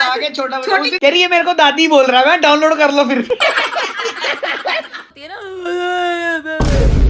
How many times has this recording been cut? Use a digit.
2